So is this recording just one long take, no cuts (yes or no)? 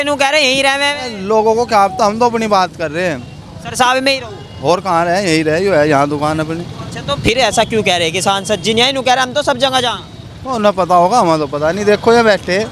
yes